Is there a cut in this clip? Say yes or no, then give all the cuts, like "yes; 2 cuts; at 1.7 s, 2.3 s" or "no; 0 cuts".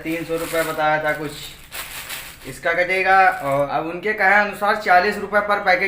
yes; 1 cut; at 3.7 s